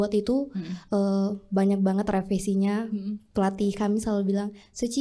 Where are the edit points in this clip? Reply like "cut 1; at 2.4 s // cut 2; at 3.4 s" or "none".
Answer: none